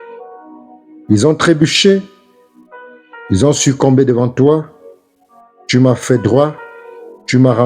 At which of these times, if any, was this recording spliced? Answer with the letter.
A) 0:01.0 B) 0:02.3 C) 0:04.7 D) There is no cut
A